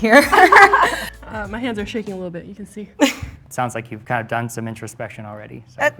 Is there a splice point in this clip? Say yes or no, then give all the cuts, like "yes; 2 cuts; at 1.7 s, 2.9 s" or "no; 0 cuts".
yes; 2 cuts; at 1.1 s, 3.9 s